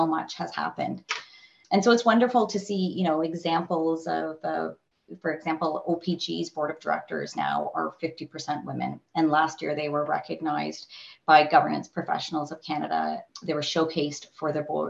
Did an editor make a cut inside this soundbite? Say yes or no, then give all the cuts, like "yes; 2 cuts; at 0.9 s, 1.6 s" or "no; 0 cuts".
yes; 2 cuts; at 1.6 s, 13.3 s